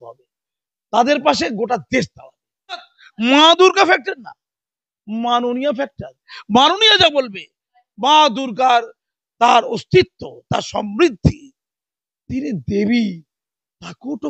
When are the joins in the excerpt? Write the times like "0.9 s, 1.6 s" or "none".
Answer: 2.9 s